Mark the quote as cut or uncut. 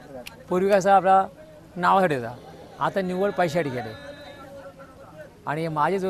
uncut